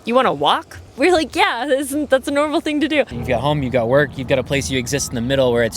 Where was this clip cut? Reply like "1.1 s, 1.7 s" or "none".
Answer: 0.9 s, 3.2 s